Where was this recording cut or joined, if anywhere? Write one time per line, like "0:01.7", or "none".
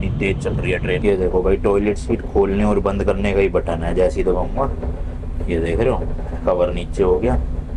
0:01.0